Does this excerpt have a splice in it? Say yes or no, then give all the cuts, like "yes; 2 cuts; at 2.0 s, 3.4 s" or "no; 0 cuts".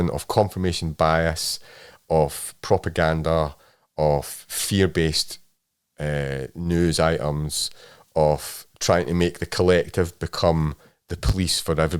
no; 0 cuts